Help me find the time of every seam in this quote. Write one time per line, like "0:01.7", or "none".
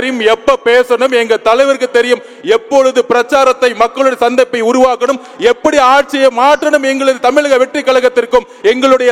none